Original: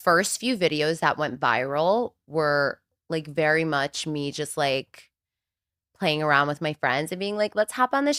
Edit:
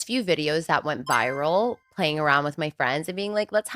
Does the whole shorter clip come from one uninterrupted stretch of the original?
no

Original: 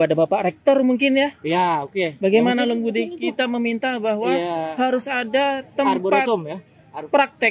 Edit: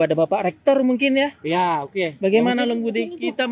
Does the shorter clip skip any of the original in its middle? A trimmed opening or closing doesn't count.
no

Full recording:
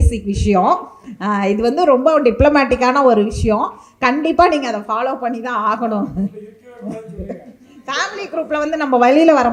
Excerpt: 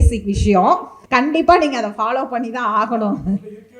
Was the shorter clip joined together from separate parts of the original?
yes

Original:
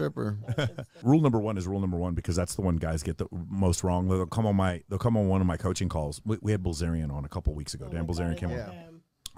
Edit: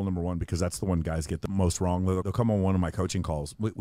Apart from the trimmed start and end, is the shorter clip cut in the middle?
yes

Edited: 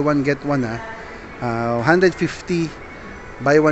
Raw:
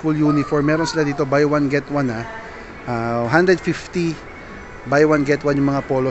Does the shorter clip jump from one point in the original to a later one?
no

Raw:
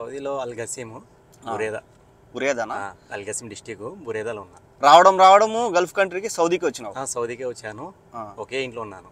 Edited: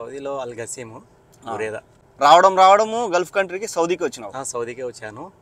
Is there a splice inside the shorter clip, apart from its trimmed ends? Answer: yes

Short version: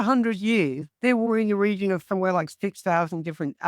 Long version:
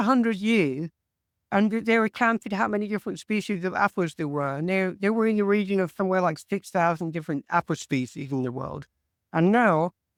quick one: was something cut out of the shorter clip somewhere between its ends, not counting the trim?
yes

